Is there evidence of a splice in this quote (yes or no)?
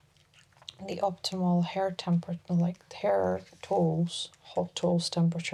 no